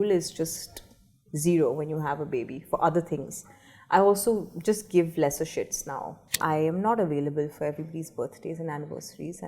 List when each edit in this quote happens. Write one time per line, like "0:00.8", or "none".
0:06.3